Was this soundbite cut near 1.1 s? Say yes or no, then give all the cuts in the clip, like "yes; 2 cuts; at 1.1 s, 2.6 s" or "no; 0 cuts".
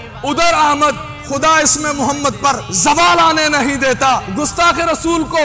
yes; 3 cuts; at 1.1 s, 2.7 s, 4.3 s